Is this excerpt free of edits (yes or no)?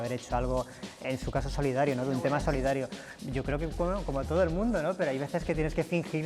yes